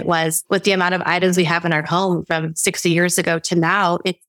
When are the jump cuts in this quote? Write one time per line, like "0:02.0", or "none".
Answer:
none